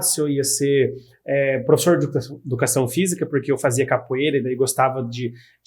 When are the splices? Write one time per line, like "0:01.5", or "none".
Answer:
none